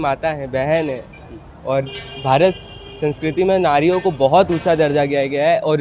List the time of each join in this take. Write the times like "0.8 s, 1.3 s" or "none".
none